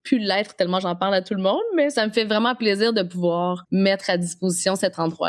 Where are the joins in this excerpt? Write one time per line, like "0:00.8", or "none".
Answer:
0:03.6